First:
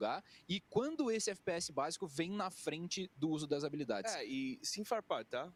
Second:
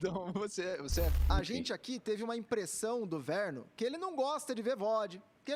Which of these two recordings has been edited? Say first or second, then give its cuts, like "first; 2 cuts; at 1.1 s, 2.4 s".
second; 1 cut; at 1.1 s